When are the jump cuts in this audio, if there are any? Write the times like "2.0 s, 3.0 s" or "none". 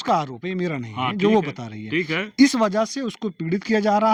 none